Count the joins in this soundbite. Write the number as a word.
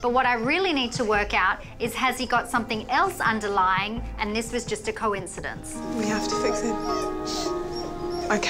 one